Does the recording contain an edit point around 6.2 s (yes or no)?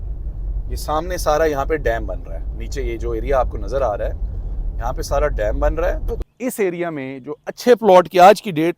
yes